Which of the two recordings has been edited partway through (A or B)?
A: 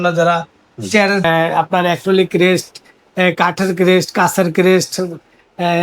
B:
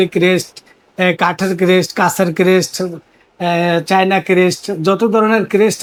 A